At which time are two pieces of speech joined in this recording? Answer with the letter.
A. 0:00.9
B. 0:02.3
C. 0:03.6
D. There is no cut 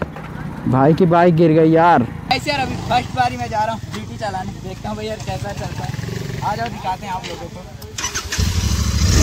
B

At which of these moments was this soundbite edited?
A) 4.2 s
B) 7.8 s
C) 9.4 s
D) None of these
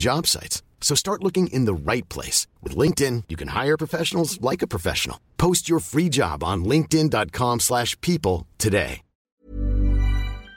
C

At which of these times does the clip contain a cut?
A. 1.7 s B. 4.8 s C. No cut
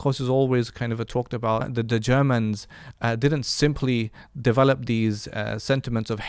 A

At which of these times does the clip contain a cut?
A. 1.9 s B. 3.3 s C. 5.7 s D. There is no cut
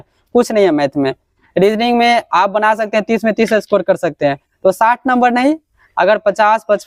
D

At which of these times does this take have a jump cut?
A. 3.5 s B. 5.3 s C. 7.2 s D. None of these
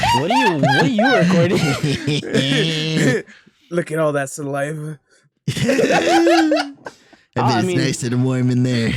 D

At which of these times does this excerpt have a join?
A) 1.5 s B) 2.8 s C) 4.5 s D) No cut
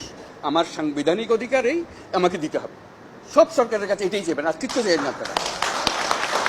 D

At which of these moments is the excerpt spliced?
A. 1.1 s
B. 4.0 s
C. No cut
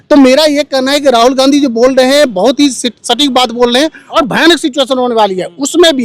B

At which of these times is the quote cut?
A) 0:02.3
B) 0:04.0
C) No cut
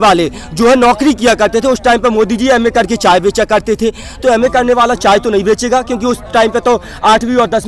C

